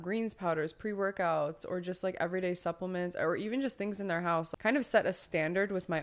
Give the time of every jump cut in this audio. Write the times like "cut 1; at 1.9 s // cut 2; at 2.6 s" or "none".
cut 1; at 4.5 s